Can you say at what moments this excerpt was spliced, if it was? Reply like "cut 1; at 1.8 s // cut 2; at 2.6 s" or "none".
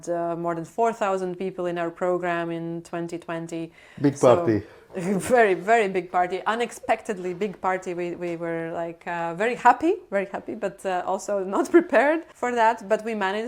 none